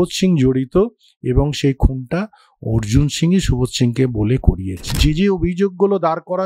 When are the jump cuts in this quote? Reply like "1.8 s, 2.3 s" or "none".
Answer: 4.9 s